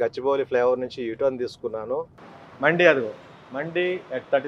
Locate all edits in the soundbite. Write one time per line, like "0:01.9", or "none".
0:02.1

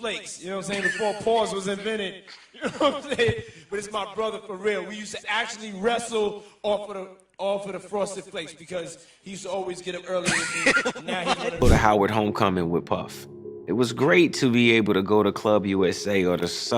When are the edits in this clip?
0:11.6

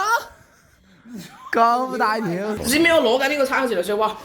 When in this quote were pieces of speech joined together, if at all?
0:02.6

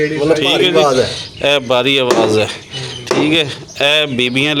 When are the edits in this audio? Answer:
none

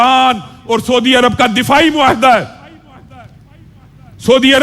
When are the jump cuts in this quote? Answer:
none

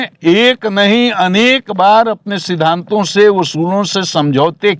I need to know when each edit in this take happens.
none

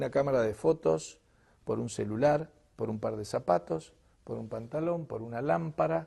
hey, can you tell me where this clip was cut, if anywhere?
0:03.2

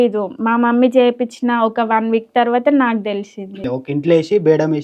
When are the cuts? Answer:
0:03.6

